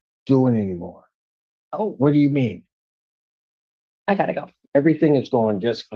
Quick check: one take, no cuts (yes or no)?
yes